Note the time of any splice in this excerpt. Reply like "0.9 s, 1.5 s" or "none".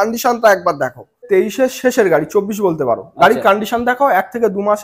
1.2 s